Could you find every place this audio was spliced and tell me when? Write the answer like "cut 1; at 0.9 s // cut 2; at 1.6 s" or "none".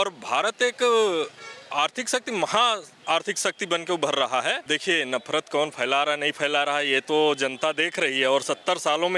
cut 1; at 4.6 s